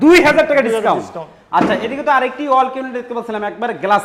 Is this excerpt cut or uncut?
uncut